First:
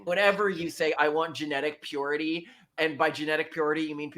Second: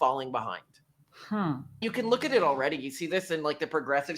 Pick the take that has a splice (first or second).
second